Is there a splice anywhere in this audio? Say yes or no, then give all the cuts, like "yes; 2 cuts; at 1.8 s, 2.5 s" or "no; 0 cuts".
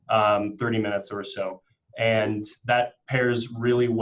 no; 0 cuts